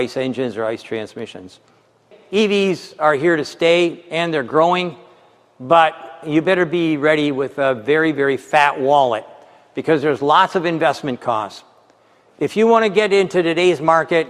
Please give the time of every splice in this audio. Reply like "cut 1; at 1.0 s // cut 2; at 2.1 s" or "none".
cut 1; at 2.1 s